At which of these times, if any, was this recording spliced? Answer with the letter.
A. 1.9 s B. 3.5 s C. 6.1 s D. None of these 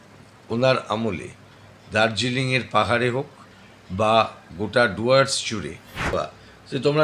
C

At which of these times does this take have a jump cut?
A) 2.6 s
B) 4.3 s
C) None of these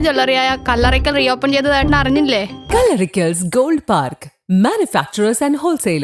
A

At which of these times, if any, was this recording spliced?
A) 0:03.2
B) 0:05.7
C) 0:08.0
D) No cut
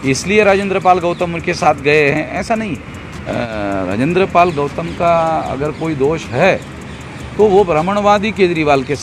A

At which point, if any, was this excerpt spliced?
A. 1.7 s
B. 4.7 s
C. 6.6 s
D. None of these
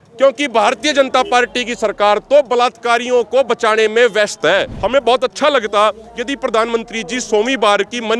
B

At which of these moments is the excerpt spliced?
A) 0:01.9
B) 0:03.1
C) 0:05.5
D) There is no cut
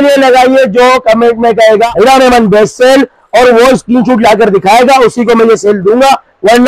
D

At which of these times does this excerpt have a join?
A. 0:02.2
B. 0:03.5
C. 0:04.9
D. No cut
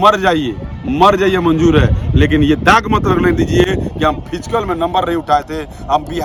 D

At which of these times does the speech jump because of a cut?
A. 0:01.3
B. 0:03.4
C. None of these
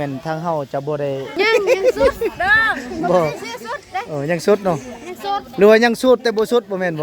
A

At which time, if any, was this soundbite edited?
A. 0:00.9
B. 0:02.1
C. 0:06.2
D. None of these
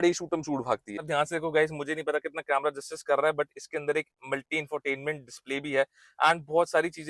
A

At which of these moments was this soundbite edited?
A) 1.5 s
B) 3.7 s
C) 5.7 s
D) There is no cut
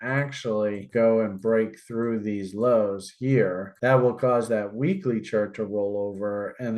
B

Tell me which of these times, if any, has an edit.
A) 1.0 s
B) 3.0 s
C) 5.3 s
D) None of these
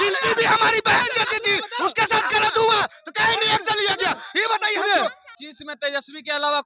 C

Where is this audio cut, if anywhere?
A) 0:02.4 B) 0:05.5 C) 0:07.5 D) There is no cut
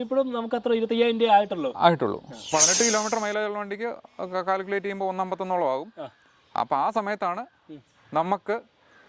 A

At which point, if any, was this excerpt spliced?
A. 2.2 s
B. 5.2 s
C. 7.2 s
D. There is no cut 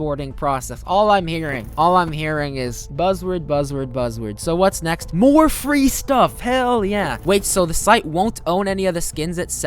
C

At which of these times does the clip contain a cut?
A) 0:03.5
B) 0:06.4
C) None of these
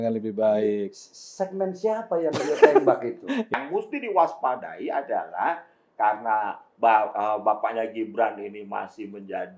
A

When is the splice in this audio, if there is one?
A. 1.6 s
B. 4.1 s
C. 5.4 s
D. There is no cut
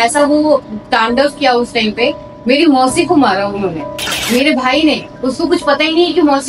B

